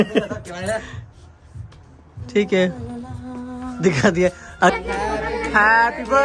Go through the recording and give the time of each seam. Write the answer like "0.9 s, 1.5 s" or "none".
4.7 s